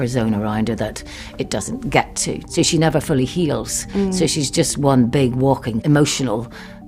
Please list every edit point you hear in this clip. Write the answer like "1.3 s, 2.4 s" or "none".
2.4 s, 5.8 s